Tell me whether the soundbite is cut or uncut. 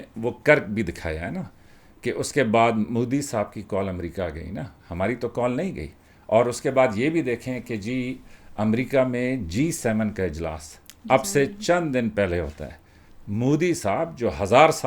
uncut